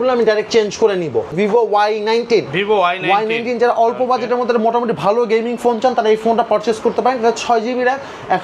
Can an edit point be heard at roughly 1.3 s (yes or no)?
yes